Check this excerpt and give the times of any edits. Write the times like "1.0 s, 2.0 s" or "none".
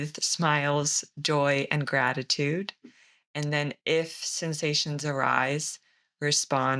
none